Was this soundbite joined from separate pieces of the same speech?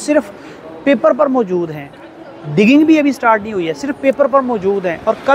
no; 0 cuts

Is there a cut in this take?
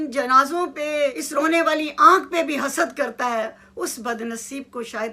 yes; 1 cut; at 1.2 s

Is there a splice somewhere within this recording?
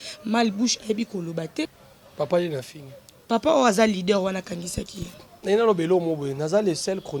yes; 1 cut; at 1.8 s

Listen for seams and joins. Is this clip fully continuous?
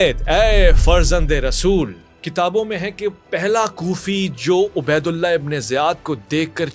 yes; 0 cuts

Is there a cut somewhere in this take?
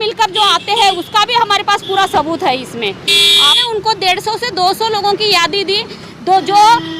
yes; 1 cut; at 3.6 s

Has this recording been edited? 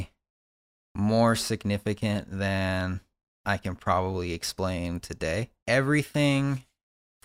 yes; 1 cut; at 5.6 s

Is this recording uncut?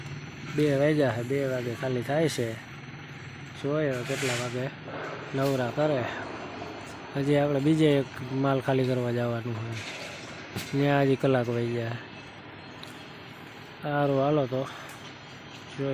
yes; 0 cuts

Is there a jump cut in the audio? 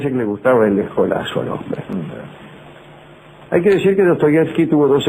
yes; 1 cut; at 2.0 s

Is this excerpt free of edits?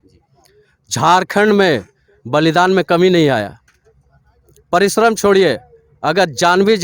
yes; 0 cuts

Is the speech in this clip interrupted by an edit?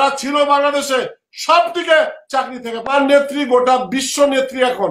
yes; 1 cut; at 2.9 s

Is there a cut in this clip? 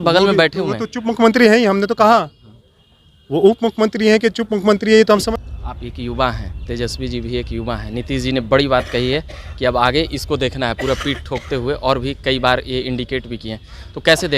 yes; 1 cut; at 5.3 s

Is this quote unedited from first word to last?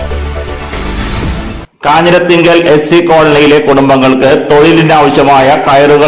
no; 1 cut; at 1.7 s

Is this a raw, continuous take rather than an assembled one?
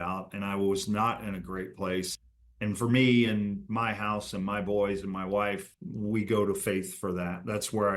no; 2 cuts; at 2.1 s, 5.7 s

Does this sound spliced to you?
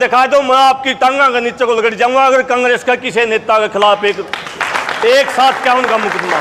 no; 0 cuts

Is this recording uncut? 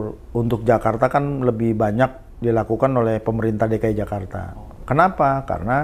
yes; 0 cuts

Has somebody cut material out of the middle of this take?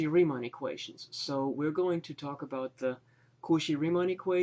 no; 0 cuts

